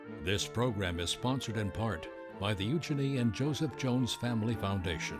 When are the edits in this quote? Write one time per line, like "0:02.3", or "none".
none

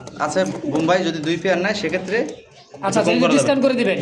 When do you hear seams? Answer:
none

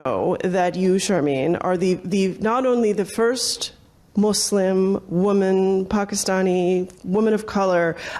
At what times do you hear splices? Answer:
none

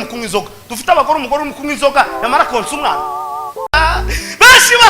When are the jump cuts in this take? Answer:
0:03.7

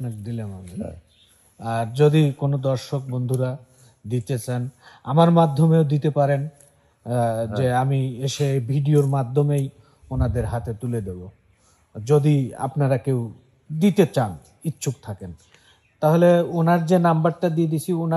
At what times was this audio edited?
none

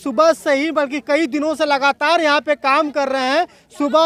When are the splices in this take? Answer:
none

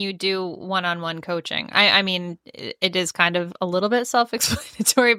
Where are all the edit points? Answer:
none

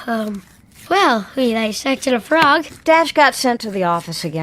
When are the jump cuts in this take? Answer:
0:02.7

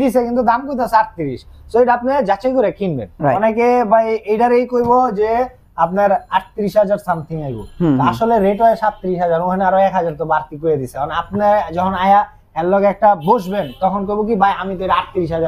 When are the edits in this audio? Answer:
0:03.4

